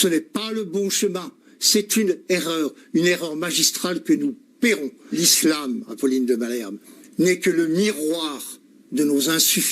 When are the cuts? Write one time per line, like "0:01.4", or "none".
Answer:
0:05.1